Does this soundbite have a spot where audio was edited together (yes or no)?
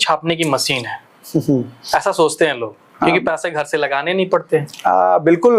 no